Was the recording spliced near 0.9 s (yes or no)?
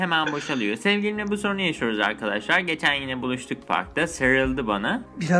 yes